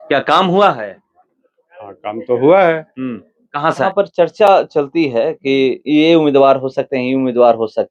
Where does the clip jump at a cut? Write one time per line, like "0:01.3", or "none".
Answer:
0:03.8